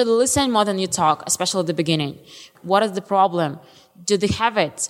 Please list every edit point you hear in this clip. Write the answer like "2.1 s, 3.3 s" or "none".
2.5 s

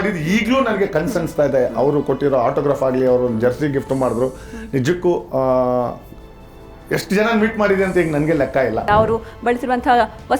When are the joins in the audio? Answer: 8.9 s

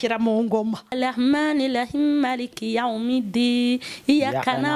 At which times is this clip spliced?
0.9 s

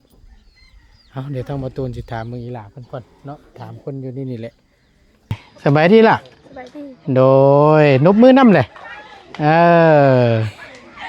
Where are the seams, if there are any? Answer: 5.5 s

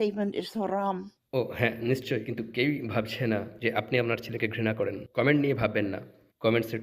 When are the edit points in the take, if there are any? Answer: 1.2 s

